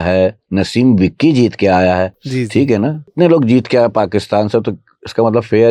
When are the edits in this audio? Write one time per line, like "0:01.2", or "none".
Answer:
0:02.2
0:03.1